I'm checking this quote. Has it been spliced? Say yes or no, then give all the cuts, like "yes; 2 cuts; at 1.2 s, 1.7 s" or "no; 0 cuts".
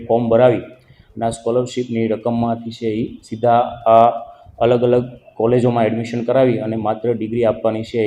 no; 0 cuts